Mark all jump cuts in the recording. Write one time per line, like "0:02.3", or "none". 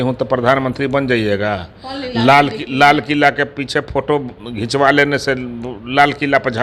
none